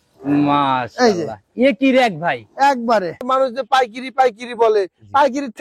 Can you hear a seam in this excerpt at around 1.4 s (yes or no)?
no